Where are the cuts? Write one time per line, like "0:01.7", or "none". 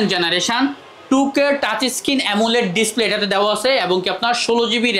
none